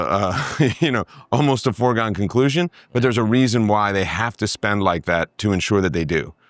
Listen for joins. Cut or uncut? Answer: uncut